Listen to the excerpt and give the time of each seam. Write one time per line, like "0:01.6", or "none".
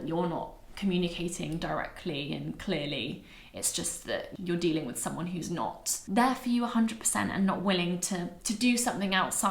0:04.3